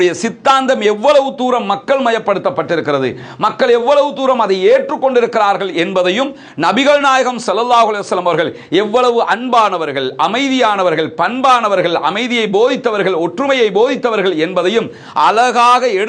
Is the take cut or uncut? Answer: uncut